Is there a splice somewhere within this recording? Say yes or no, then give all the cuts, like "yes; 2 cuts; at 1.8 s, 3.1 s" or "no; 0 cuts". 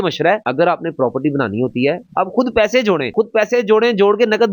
yes; 1 cut; at 2.1 s